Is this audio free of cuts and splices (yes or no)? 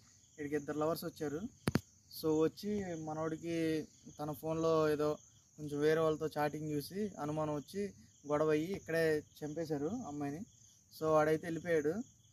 yes